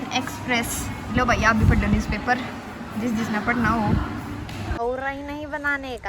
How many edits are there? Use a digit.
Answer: 1